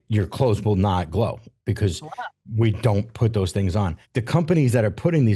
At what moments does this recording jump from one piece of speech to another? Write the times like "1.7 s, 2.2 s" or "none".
4.1 s

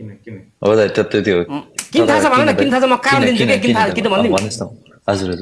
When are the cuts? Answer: none

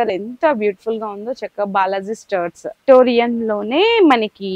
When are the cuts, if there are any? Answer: 2.8 s

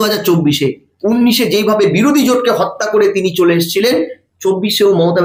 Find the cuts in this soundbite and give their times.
none

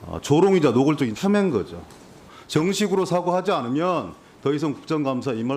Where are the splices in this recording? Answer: 1.1 s, 2.3 s

